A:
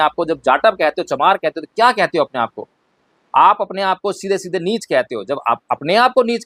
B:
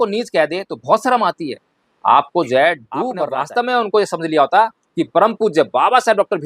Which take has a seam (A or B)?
B